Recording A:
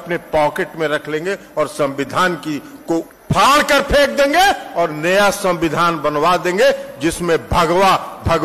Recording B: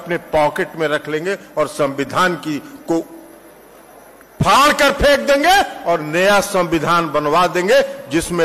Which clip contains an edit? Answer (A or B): A